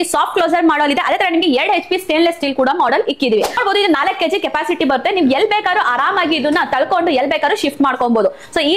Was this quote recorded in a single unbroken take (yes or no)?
no